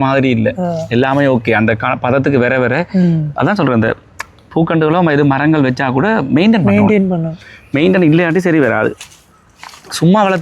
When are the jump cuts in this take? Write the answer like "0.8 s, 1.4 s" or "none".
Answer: none

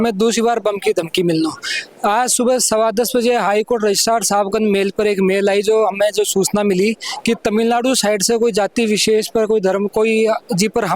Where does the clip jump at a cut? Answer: none

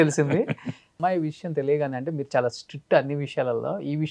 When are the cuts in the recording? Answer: 1.0 s

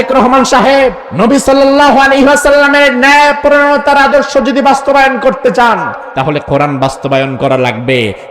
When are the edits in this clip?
1.0 s, 6.0 s

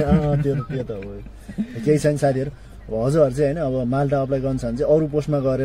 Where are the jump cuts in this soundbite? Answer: none

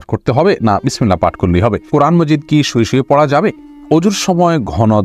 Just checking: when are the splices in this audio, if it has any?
1.9 s, 3.7 s

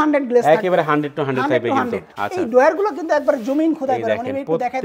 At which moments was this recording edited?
2.1 s

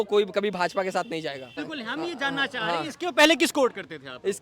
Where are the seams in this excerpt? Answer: 1.5 s

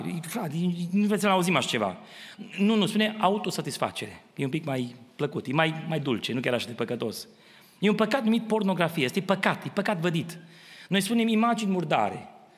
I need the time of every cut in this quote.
none

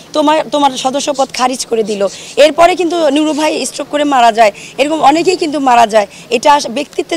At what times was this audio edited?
none

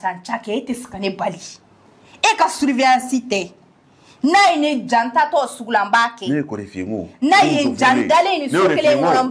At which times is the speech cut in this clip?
none

